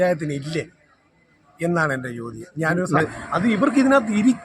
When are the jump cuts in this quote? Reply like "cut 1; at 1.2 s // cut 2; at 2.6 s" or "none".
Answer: cut 1; at 3.0 s